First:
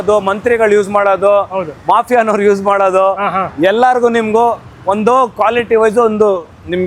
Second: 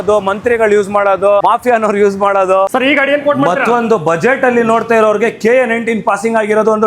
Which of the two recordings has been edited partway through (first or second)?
second